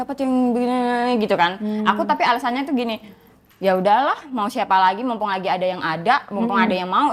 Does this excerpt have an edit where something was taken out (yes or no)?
no